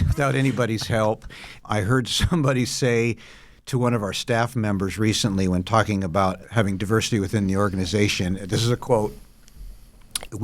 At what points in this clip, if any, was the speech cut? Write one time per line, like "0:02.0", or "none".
0:01.5
0:06.4